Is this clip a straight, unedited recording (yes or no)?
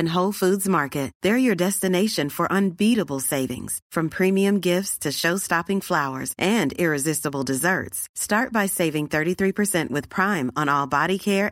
yes